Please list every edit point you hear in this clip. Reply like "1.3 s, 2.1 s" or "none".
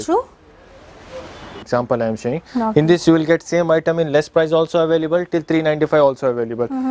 1.6 s